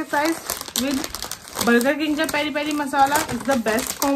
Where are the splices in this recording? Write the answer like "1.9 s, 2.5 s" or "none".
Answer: none